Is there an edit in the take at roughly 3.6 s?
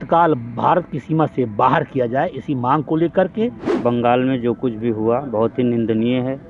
yes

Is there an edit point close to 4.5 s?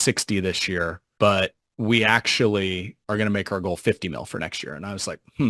no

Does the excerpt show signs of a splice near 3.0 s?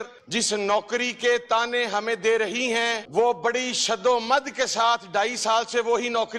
yes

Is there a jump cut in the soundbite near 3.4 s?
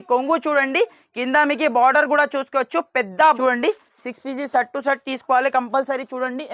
yes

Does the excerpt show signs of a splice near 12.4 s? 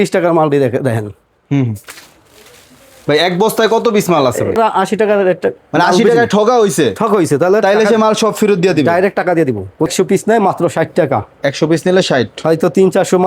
no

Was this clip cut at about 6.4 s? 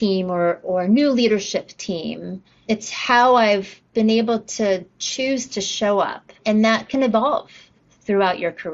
yes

